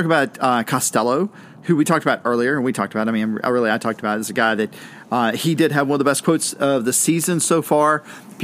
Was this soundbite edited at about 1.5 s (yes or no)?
yes